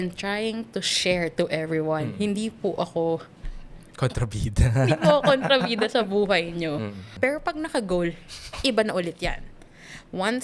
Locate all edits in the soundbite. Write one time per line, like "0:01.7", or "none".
0:07.0